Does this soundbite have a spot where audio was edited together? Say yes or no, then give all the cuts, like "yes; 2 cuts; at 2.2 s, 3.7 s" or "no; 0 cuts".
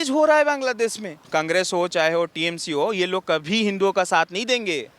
yes; 1 cut; at 1.2 s